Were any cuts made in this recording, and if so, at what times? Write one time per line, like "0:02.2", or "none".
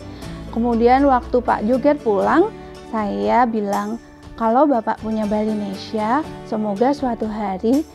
none